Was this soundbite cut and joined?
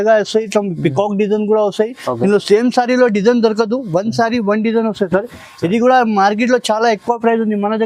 no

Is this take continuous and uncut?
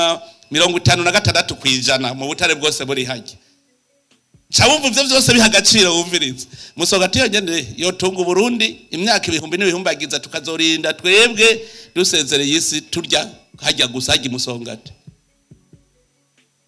yes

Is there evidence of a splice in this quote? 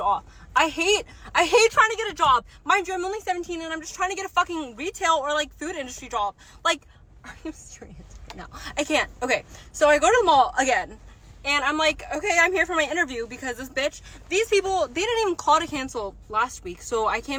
no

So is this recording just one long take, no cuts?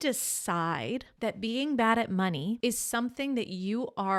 yes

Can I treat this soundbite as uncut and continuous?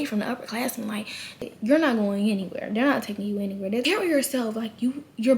no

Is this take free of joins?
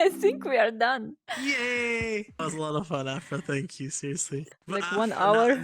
no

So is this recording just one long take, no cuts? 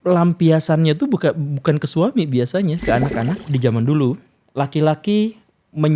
no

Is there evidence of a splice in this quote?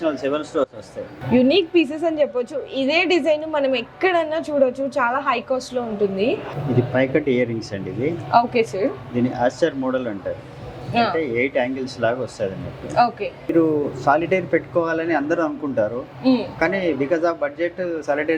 yes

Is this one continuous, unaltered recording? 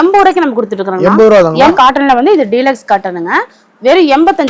no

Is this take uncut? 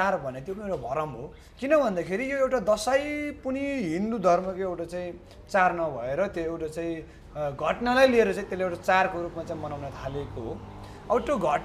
yes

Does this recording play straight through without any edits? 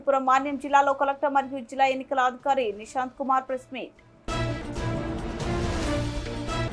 yes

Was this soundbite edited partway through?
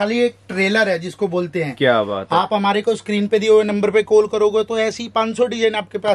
no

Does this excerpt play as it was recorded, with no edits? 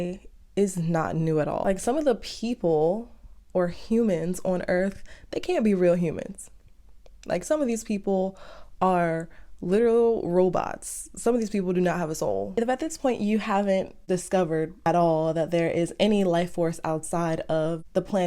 no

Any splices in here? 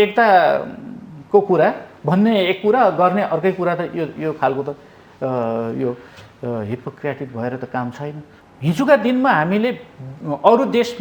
yes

